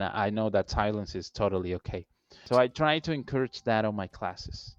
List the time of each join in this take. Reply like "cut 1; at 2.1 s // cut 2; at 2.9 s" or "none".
cut 1; at 2.4 s